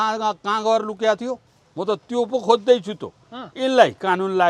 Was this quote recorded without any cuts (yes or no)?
no